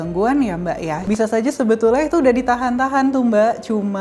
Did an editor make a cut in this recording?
yes; 1 cut; at 1.0 s

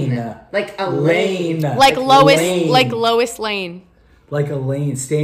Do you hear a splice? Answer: no; 0 cuts

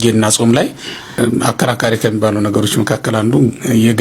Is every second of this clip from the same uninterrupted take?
no; 1 cut; at 1.2 s

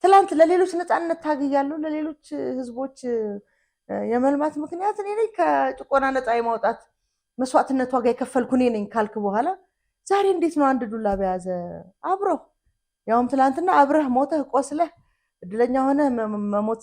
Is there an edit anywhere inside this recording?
no; 0 cuts

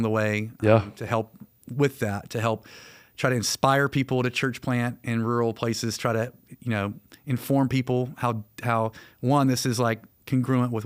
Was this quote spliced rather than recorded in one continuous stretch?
no; 0 cuts

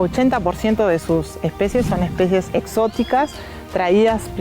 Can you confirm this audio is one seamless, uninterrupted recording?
no; 1 cut; at 2.5 s

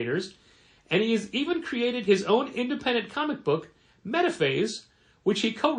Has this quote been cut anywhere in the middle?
no; 0 cuts

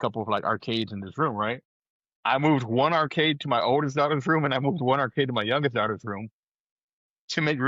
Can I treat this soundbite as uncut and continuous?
yes; 0 cuts

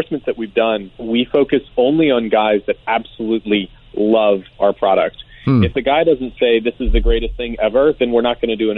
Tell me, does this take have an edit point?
yes; 1 cut; at 0.9 s

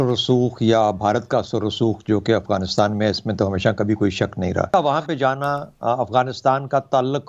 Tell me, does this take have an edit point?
yes; 1 cut; at 4.7 s

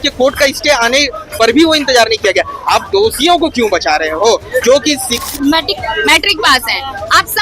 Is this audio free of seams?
no; 1 cut; at 5.2 s

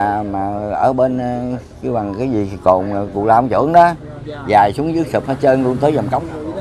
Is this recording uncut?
yes; 0 cuts

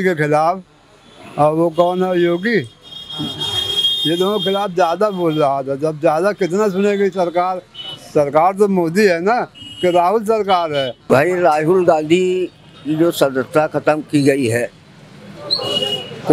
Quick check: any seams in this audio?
no; 0 cuts

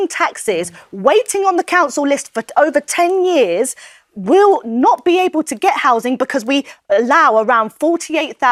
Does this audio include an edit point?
no; 0 cuts

